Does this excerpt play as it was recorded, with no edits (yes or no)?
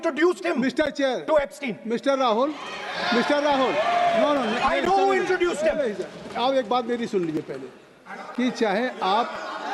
yes